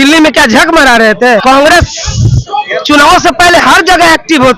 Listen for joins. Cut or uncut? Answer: cut